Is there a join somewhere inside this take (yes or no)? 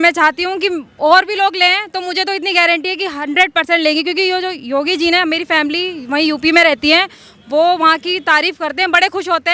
no